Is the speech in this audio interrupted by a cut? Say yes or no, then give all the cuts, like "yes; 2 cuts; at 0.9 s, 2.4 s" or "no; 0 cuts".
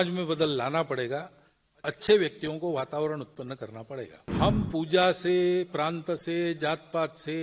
yes; 1 cut; at 4.2 s